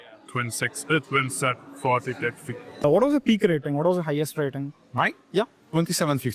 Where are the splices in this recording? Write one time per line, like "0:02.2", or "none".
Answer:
0:02.8